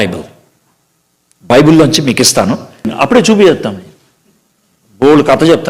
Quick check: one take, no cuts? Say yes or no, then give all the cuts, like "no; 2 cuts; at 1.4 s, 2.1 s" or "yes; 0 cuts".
no; 1 cut; at 2.9 s